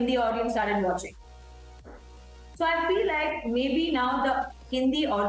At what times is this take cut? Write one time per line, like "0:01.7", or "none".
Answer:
none